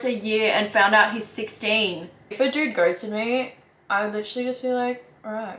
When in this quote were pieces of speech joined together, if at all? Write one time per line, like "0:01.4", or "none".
0:02.3